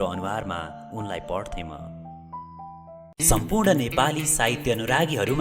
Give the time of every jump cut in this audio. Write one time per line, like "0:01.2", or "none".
0:03.1

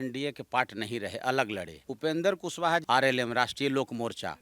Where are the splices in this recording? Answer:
0:01.8
0:02.8

